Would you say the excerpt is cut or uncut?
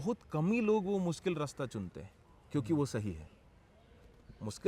uncut